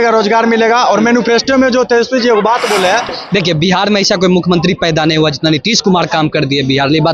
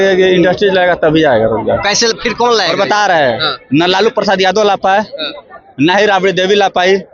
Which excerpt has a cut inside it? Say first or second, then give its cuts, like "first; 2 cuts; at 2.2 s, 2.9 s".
first; 1 cut; at 3.2 s